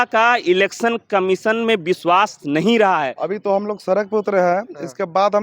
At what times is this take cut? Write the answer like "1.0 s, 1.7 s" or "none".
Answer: 3.2 s